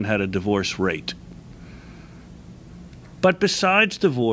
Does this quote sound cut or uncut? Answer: uncut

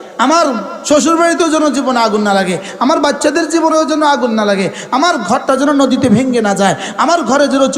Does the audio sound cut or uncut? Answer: uncut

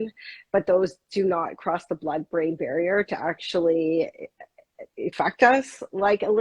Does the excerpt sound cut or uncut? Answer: cut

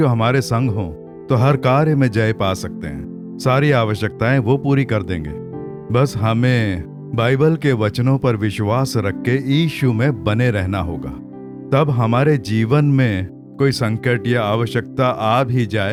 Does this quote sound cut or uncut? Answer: uncut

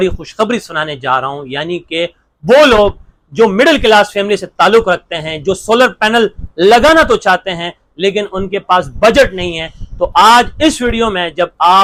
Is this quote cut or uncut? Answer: uncut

